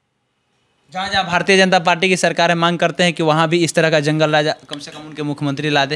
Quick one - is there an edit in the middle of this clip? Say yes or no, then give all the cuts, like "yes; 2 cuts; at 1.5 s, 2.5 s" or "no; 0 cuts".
no; 0 cuts